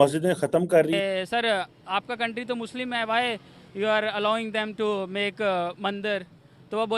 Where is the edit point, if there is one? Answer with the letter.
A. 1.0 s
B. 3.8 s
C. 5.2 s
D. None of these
A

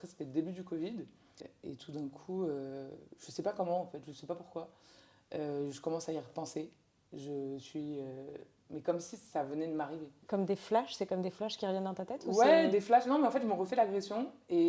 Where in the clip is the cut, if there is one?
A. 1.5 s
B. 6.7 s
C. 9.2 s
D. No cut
A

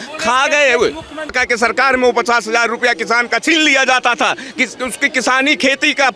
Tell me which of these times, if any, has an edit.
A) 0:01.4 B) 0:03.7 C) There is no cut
A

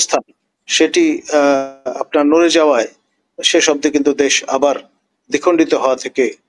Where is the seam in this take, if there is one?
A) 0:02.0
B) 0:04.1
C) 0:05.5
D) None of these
D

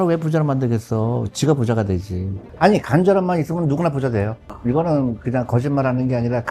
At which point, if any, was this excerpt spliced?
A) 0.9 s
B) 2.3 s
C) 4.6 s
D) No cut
B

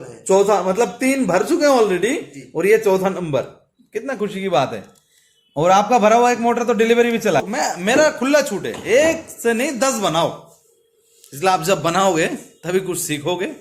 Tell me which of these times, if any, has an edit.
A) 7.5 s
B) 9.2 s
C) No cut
A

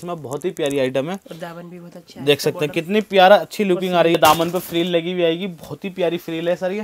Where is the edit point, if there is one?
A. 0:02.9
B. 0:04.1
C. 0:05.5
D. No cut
B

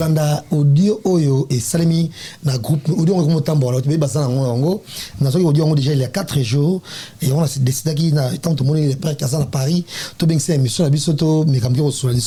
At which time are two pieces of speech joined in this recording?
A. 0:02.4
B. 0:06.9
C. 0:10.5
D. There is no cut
D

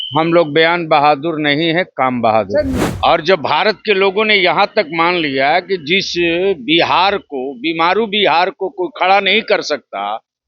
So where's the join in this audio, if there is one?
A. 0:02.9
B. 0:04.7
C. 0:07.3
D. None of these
A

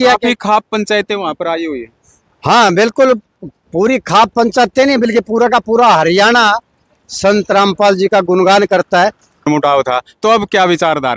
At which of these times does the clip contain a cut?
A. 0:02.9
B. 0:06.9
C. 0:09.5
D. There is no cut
C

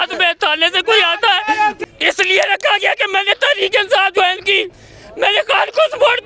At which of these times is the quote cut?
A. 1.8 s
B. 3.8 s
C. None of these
A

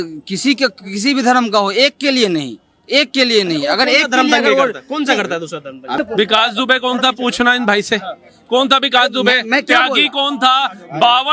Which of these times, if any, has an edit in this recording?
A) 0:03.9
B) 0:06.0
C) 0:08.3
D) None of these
B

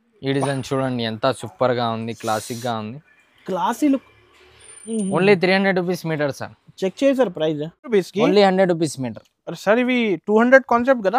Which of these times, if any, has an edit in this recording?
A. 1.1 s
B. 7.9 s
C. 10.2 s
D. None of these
B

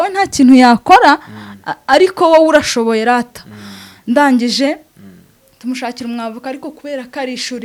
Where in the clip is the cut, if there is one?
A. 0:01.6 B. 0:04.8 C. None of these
C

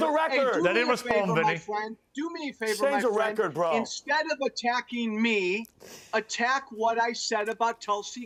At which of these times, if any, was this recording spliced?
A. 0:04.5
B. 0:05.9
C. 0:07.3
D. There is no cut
D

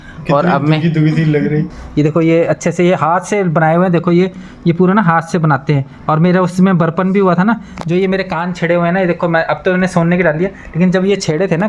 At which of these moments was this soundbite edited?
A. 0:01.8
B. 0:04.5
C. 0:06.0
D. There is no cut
A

